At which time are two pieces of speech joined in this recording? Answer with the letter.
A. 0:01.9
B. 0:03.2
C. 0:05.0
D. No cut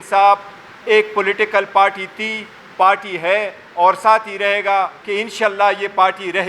C